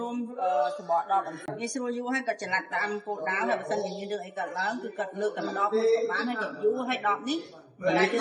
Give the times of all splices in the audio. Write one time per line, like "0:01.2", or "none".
0:01.5